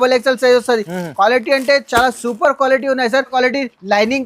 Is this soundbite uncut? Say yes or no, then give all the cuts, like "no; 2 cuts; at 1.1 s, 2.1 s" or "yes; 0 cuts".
no; 1 cut; at 3.3 s